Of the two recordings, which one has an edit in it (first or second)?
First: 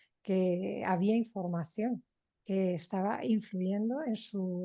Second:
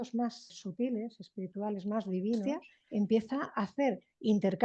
second